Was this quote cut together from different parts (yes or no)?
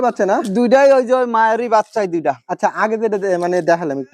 no